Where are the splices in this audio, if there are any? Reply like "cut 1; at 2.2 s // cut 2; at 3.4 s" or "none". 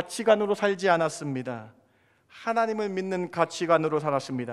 none